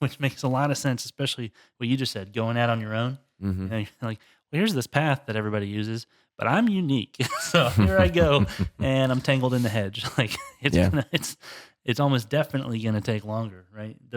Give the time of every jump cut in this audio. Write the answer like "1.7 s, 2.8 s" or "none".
none